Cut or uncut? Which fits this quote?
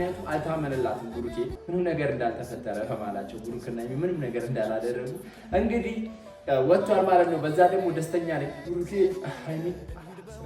cut